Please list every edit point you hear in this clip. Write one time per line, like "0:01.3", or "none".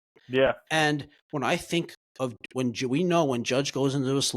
0:02.0